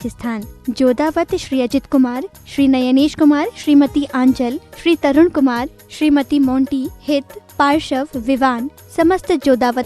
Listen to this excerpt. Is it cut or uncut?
uncut